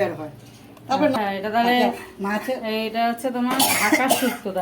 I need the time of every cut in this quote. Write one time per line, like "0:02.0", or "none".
0:01.2